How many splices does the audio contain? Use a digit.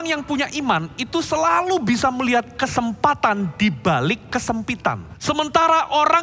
1